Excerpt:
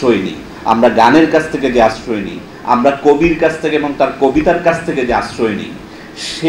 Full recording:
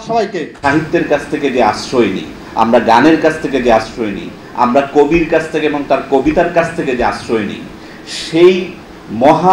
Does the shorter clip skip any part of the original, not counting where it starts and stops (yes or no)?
no